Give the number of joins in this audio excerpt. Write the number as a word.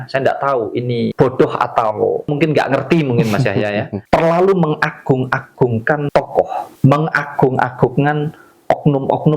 four